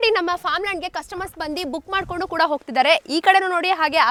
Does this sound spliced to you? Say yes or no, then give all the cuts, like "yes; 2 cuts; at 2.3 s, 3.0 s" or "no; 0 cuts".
no; 0 cuts